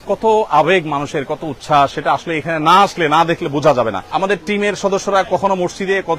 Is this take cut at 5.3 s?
no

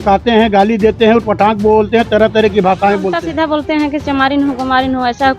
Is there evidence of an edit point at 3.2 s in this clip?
yes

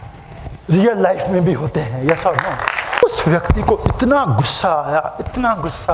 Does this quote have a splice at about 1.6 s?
no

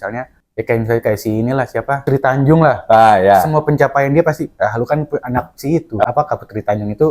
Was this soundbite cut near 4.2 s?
no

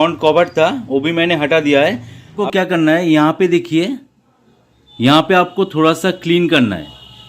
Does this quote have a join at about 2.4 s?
yes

